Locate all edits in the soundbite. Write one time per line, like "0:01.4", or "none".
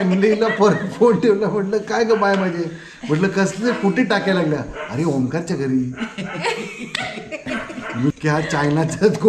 0:08.1